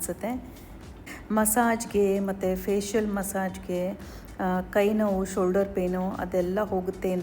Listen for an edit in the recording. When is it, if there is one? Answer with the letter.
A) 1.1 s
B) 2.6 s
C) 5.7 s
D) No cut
A